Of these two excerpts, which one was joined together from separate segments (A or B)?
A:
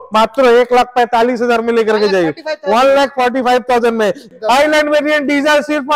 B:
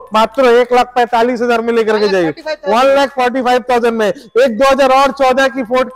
A